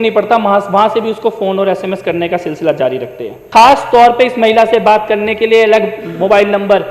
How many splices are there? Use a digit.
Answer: 1